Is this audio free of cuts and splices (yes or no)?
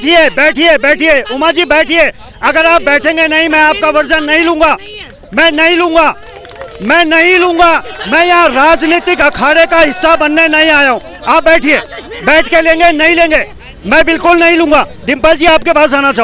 yes